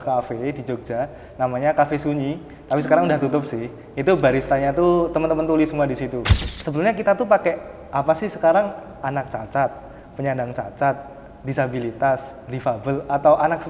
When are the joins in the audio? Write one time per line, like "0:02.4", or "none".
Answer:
0:06.3